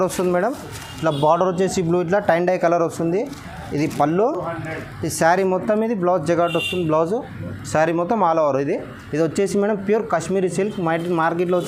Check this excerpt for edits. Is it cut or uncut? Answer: uncut